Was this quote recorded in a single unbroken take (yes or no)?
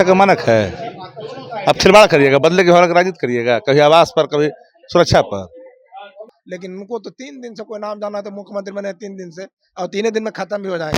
no